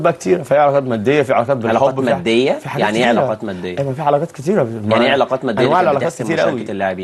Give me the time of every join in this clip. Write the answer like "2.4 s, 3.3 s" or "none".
none